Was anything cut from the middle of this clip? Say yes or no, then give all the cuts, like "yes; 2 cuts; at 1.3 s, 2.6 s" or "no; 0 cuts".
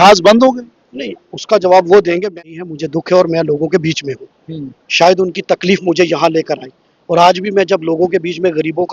yes; 1 cut; at 2.3 s